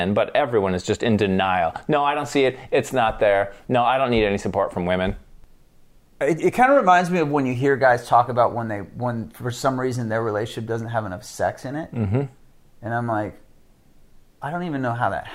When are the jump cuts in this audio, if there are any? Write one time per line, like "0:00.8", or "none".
0:05.3